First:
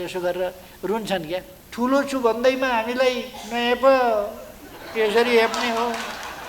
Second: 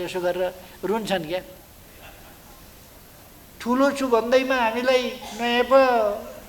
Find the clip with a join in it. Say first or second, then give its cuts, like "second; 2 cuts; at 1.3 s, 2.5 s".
first; 1 cut; at 1.6 s